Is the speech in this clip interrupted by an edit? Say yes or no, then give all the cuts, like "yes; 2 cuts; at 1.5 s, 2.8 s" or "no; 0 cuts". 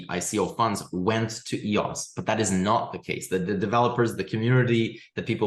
no; 0 cuts